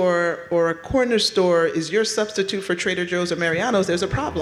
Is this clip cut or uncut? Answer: uncut